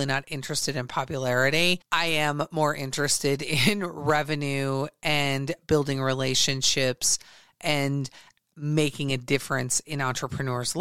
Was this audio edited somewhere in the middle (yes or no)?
no